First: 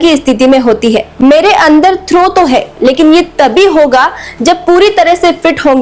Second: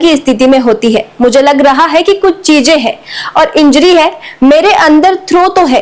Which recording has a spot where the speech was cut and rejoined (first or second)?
first